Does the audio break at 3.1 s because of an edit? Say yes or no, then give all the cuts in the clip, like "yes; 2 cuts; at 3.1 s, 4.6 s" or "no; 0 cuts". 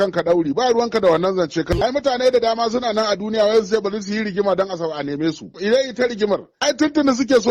no; 3 cuts; at 1.7 s, 5.5 s, 6.5 s